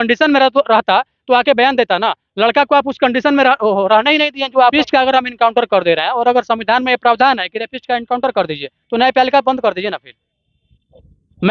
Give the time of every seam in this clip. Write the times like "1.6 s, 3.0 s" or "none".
4.7 s